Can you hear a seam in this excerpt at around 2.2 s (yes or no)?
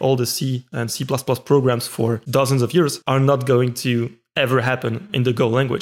yes